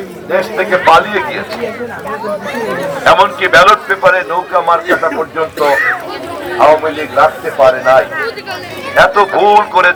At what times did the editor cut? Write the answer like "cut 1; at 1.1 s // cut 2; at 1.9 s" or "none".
none